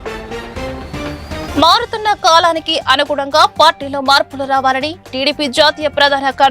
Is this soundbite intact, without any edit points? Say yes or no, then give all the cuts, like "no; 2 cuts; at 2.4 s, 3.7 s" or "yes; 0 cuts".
no; 1 cut; at 1.0 s